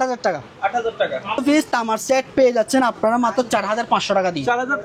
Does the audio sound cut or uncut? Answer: cut